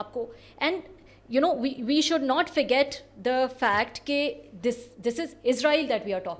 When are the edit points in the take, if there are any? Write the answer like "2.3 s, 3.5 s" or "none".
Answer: none